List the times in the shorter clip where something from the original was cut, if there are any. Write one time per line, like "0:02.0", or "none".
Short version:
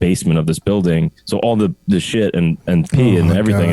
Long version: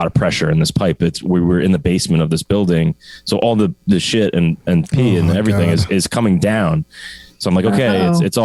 0:01.2